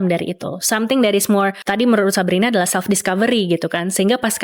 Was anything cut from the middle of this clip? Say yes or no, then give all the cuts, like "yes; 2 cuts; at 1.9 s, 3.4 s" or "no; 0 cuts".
yes; 1 cut; at 1.6 s